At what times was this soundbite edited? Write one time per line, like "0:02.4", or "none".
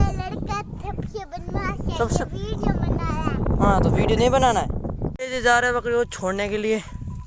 0:05.1